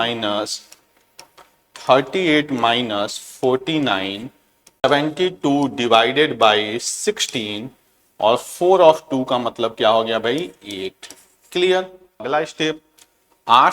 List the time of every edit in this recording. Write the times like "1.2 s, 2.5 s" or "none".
4.8 s, 12.2 s